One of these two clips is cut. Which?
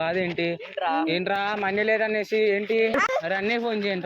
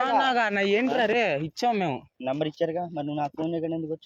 first; 1 cut; at 3.2 s

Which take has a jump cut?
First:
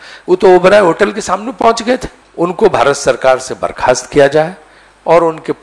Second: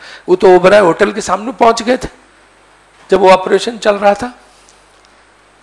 first; 1 cut; at 2.2 s

